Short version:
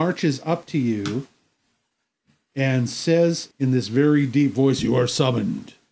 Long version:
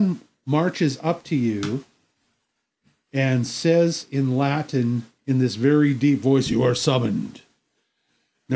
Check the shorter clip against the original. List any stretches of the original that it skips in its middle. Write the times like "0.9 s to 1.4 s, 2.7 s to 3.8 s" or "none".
4.0 s to 5.1 s